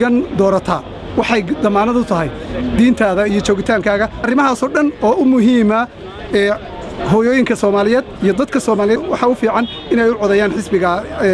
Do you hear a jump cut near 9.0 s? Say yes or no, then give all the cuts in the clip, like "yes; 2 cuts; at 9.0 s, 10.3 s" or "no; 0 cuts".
yes; 2 cuts; at 4.2 s, 9.0 s